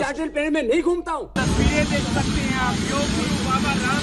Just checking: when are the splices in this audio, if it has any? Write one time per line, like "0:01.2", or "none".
0:01.4

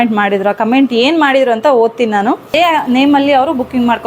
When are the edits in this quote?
0:02.5

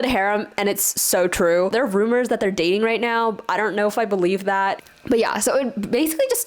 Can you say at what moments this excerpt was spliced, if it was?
0:01.7
0:04.8

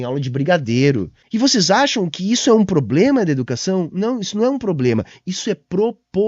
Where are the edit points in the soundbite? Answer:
0:01.2

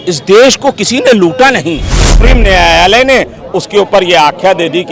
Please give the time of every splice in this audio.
0:02.2

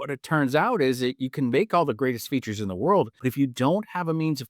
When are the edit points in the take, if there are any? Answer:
0:03.1

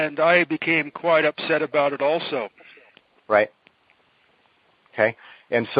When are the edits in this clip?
0:04.6

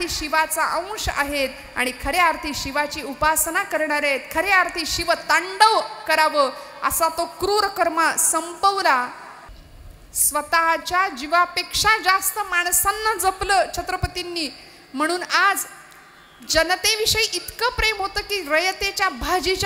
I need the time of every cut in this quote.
0:09.5

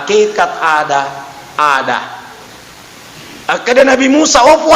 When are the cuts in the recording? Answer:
0:03.4

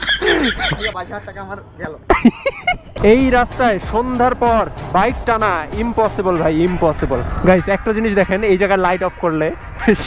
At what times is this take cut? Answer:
0:02.9
0:07.3

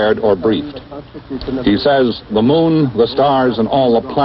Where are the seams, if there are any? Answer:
0:01.1

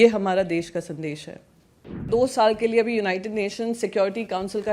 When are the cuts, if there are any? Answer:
0:02.1

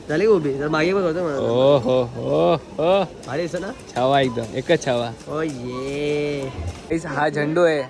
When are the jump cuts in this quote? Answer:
0:06.8

